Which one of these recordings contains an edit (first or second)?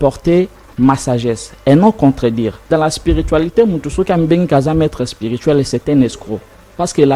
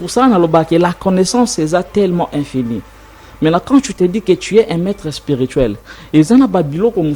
first